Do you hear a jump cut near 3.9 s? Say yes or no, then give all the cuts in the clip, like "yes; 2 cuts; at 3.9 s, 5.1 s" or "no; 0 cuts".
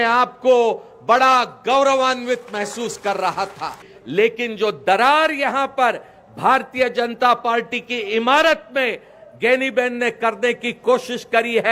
yes; 1 cut; at 3.9 s